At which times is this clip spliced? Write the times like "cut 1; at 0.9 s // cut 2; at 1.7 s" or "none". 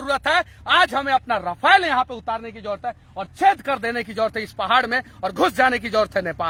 none